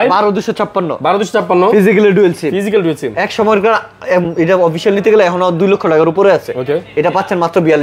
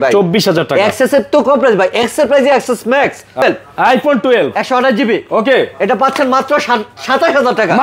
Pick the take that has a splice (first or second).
second